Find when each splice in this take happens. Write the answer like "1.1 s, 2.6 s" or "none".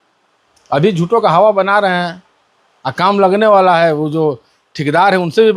none